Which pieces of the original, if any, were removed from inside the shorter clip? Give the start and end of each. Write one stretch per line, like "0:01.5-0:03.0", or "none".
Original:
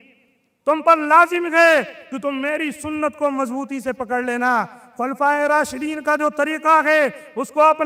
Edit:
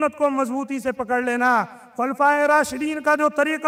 none

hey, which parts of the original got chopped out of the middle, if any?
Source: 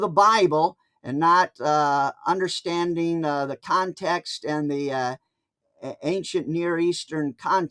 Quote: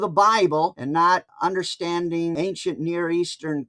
0:01.1-0:02.0
0:03.2-0:06.0

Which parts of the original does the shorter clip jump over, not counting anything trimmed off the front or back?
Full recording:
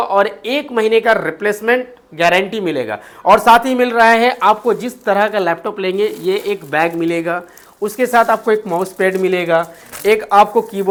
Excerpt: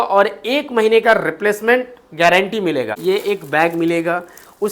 0:03.0-0:06.2

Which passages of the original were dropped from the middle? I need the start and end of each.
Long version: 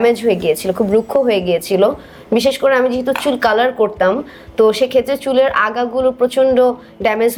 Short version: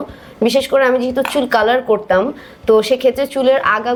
none

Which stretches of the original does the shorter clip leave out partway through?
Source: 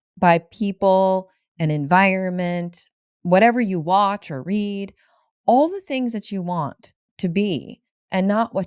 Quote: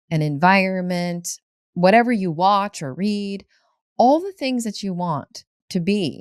none

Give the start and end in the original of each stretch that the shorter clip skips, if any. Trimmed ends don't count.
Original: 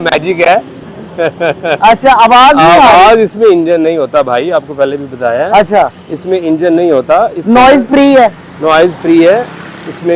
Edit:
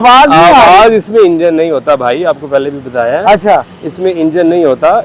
none

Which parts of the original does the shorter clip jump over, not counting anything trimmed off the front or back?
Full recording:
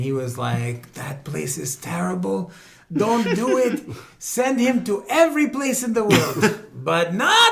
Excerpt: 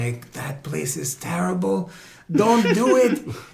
none

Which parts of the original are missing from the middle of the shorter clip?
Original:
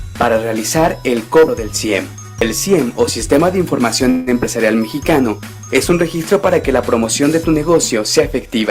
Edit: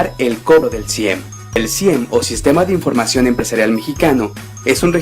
0:04.4-0:04.6

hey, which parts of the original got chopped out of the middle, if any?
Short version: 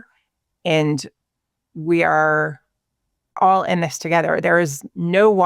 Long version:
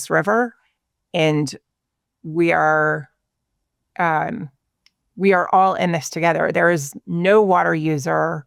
0:03.8-0:05.5

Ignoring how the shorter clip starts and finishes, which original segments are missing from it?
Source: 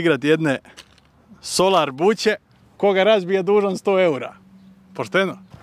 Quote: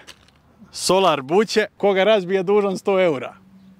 0:02.4-0:02.7

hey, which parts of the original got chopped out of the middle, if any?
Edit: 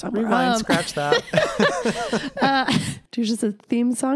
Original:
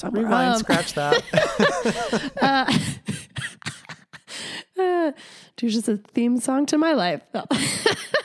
0:03.0-0:05.4

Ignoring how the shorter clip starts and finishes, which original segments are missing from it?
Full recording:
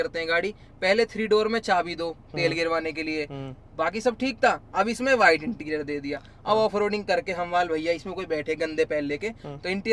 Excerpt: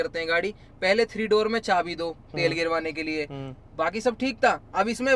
none

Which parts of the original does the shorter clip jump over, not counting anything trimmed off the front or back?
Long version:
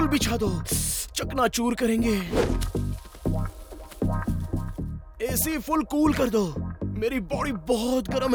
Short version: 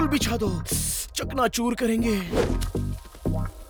none

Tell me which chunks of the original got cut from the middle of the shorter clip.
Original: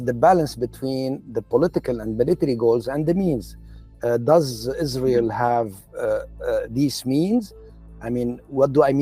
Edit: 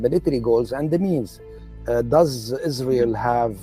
none

